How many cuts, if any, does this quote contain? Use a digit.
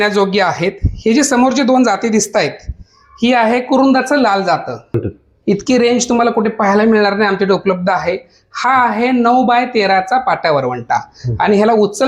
1